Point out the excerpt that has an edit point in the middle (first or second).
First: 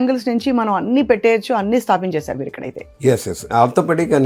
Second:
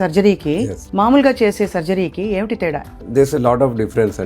second